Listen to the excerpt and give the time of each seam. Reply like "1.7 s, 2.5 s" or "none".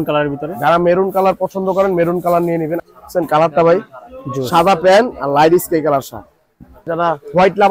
2.8 s, 6.9 s